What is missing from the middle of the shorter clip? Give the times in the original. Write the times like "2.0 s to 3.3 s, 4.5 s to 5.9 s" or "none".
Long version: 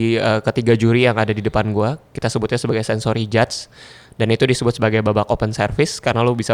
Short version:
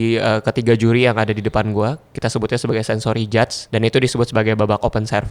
3.6 s to 4.1 s